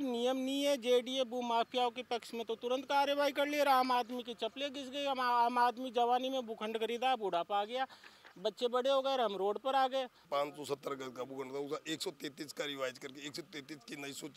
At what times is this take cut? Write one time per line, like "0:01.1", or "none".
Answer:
0:10.3